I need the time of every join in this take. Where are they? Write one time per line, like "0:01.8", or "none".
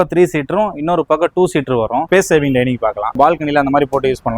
0:02.0
0:03.2